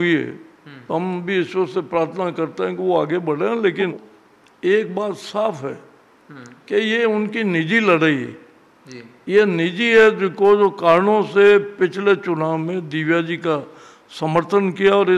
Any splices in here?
yes; 1 cut; at 3.8 s

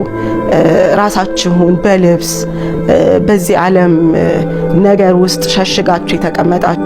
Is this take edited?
no; 0 cuts

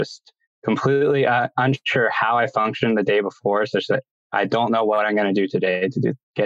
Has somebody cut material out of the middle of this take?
yes; 1 cut; at 4.2 s

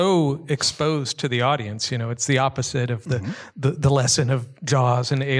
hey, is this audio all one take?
yes; 0 cuts

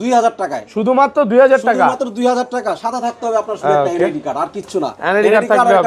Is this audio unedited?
yes; 0 cuts

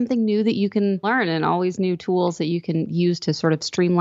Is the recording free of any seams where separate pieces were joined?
no; 1 cut; at 1.0 s

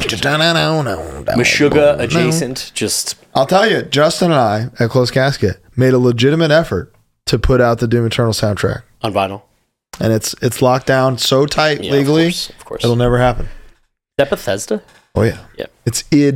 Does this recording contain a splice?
no; 0 cuts

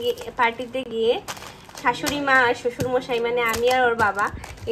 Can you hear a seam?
no; 0 cuts

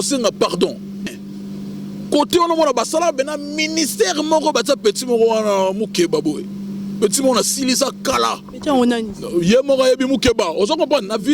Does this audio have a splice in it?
yes; 1 cut; at 1.0 s

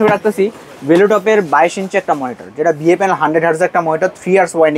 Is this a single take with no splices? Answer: yes; 0 cuts

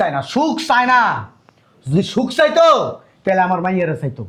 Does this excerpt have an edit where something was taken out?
no; 0 cuts

